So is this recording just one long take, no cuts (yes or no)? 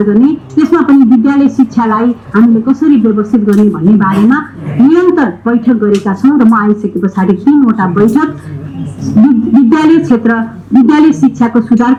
yes